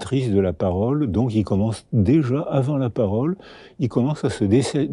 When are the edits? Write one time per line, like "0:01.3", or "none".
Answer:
none